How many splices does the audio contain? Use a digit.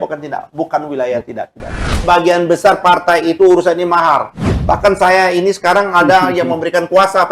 1